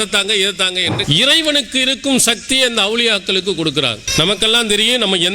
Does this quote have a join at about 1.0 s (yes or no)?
yes